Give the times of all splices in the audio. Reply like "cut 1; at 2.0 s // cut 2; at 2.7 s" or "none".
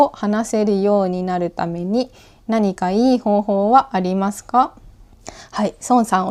none